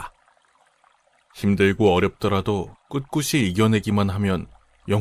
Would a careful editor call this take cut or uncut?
uncut